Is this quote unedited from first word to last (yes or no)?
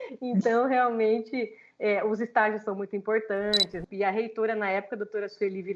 no